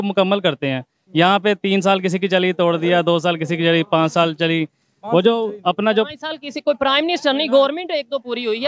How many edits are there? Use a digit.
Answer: 0